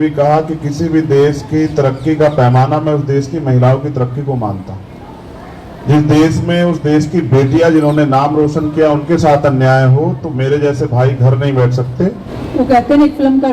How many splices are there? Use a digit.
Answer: 1